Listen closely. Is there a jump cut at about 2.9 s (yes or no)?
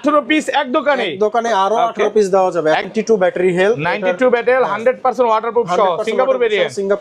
yes